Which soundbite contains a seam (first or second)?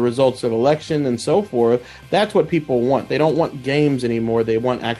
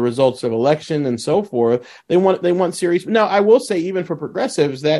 first